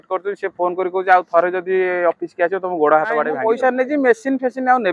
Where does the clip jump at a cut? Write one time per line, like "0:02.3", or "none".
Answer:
0:03.3

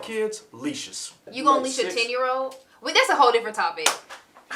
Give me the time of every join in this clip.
0:01.3

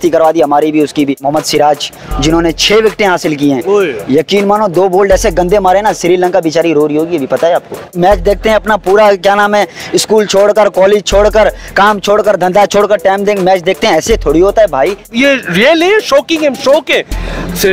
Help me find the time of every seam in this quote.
0:01.2
0:07.9
0:15.1

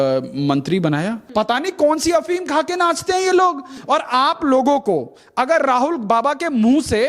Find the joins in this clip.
0:01.2
0:03.7

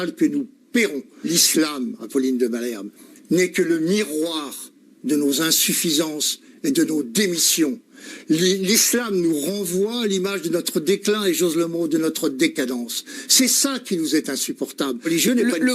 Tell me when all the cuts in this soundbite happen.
0:01.2
0:15.0

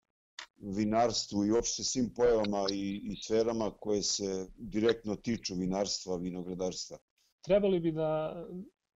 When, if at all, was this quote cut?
0:07.3

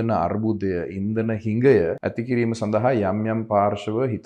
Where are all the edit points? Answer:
0:02.0

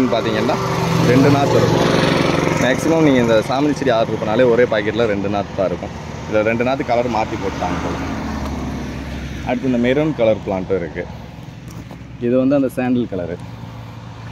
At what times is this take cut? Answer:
none

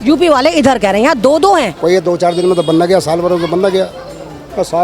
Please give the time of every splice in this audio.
0:01.7

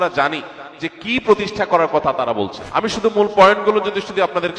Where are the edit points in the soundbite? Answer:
0:02.6

